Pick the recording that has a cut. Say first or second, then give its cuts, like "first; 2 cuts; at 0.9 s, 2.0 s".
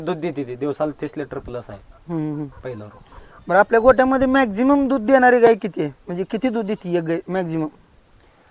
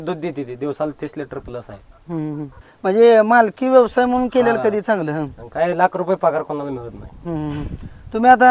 second; 1 cut; at 2.6 s